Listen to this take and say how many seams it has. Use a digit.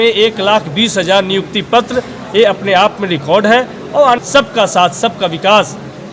1